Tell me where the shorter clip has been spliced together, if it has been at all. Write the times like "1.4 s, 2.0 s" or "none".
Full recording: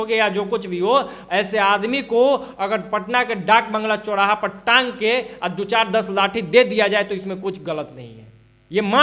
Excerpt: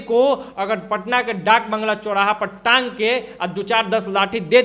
none